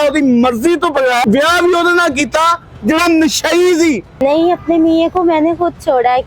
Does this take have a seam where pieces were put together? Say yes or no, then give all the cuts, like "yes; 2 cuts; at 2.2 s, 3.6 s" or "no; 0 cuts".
yes; 2 cuts; at 1.2 s, 4.1 s